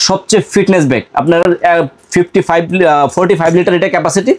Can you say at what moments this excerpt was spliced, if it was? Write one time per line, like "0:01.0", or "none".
none